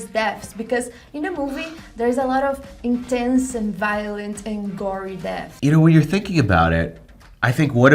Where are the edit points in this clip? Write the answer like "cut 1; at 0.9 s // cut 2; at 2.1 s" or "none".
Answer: cut 1; at 5.4 s